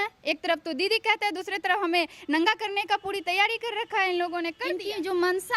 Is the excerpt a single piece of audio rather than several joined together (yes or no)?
no